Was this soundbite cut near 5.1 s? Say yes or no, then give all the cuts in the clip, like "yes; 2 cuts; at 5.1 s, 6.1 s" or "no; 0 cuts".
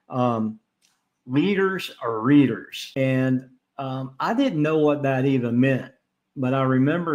no; 1 cut; at 2.8 s